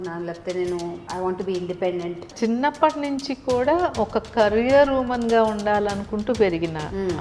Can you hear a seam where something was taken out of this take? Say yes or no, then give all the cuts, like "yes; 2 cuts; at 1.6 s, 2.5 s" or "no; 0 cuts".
yes; 2 cuts; at 1.0 s, 2.3 s